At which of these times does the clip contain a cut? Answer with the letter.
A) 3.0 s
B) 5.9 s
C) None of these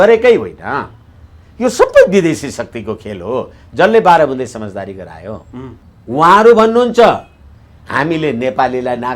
B